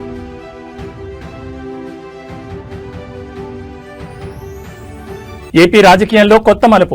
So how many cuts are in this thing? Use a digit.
1